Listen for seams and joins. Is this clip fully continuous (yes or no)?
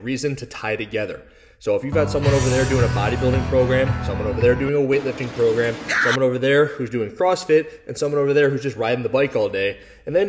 no